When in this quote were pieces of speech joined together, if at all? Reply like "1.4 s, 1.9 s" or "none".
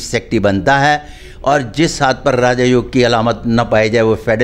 none